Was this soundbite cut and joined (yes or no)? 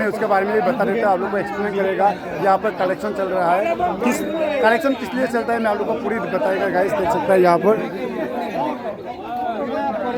no